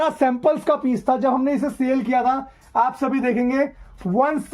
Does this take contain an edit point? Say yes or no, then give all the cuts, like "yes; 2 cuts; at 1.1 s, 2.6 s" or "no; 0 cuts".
no; 0 cuts